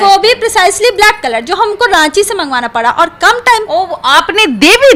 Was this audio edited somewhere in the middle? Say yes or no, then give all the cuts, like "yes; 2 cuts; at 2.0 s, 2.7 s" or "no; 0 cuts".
no; 0 cuts